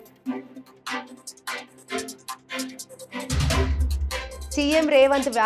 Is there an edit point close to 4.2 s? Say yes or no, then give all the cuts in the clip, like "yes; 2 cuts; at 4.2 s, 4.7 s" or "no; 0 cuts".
yes; 1 cut; at 4.2 s